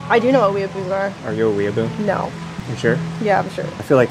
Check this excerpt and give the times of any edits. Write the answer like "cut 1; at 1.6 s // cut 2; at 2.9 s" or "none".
none